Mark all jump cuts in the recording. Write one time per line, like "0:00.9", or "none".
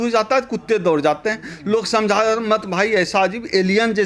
none